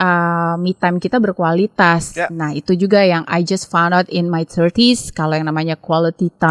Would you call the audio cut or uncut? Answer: uncut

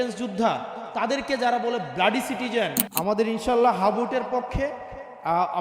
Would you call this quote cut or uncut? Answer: cut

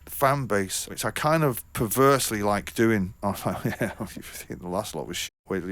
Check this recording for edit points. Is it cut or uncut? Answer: cut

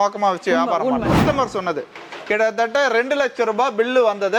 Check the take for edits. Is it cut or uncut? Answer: cut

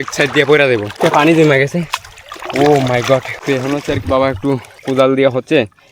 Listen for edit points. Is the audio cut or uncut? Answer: cut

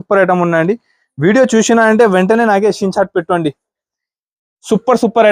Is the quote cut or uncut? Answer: uncut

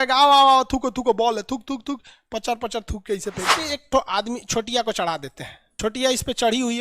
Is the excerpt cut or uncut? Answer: cut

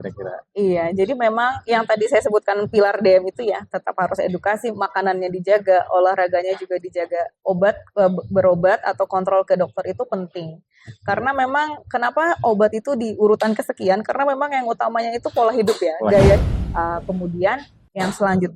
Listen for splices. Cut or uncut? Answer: cut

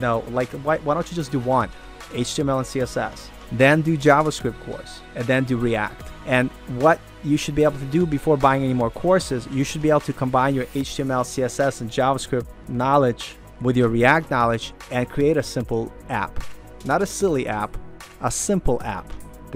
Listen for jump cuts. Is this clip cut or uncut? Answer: uncut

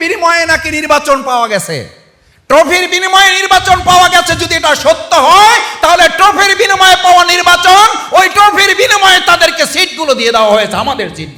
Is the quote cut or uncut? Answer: uncut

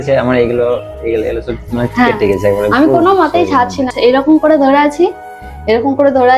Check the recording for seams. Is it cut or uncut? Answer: cut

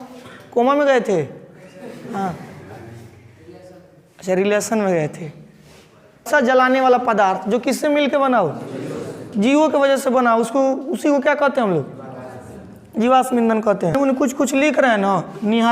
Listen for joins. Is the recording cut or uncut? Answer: cut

